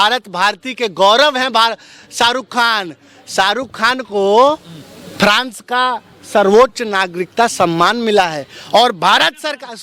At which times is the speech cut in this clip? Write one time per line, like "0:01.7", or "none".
none